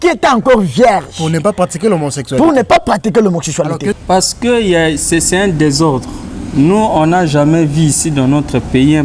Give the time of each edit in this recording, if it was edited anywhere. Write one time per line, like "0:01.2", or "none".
0:04.0